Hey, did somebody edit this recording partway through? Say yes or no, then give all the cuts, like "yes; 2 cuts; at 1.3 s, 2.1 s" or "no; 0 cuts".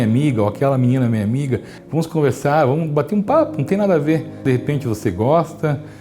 yes; 2 cuts; at 1.8 s, 4.4 s